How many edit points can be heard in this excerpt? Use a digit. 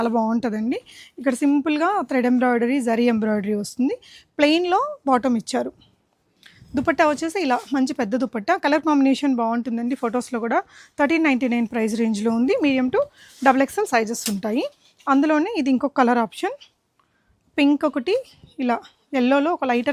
0